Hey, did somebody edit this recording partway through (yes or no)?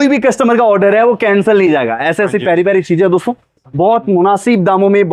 no